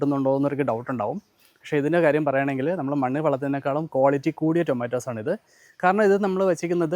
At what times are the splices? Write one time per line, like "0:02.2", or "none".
none